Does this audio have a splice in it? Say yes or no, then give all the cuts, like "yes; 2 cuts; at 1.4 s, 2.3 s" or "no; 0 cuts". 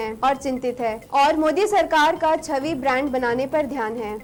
no; 0 cuts